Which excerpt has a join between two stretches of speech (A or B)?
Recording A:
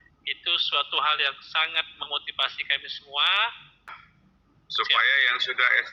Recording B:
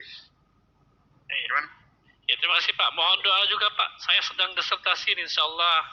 A